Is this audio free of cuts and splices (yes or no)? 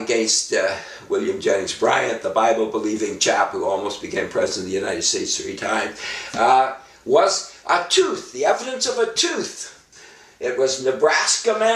yes